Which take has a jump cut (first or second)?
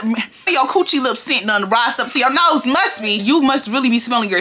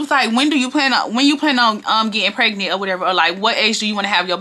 first